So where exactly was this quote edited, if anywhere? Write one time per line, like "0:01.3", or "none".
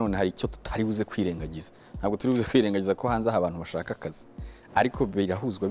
none